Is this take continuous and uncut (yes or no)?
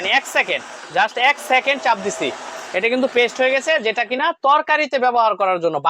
yes